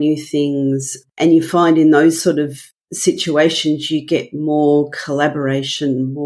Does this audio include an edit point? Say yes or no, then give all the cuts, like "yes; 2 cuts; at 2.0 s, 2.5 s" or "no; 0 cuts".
yes; 1 cut; at 1.0 s